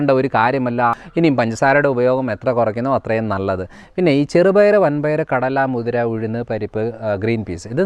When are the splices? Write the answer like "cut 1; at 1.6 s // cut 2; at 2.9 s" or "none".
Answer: cut 1; at 1.0 s